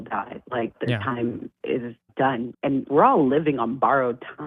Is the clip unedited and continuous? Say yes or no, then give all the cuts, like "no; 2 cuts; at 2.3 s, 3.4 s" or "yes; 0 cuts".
no; 1 cut; at 1.9 s